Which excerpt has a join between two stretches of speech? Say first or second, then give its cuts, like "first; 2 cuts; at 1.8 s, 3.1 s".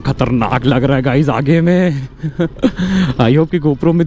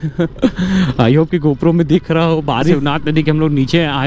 second; 1 cut; at 2.8 s